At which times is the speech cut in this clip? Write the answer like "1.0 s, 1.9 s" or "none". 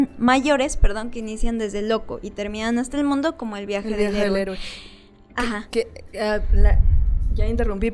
none